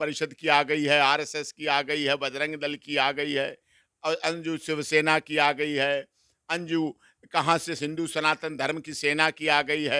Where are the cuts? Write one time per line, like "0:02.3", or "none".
none